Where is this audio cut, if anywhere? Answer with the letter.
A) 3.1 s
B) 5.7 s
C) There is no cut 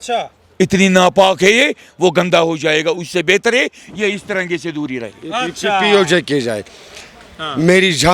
C